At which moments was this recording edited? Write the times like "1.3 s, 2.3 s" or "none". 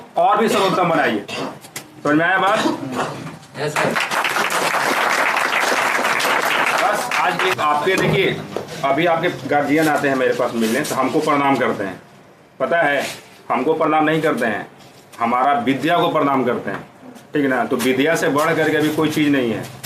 none